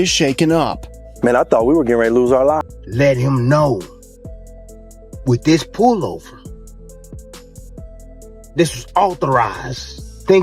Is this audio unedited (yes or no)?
no